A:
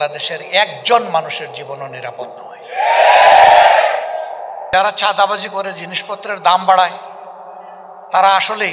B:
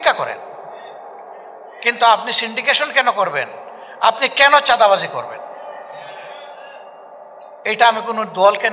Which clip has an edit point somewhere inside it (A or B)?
A